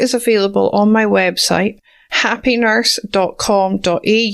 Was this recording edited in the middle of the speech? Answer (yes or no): no